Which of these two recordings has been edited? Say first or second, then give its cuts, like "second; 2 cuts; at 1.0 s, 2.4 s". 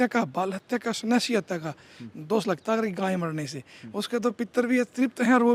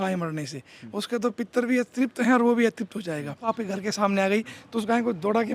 second; 1 cut; at 3.5 s